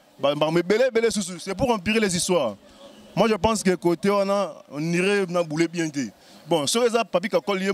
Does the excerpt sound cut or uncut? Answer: uncut